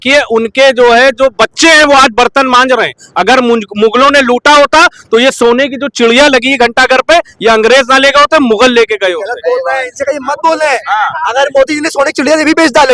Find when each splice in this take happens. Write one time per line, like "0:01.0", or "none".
none